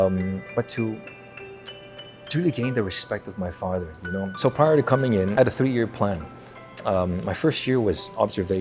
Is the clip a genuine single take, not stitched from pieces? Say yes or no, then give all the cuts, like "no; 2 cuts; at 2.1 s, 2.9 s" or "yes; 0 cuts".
no; 2 cuts; at 4.3 s, 5.3 s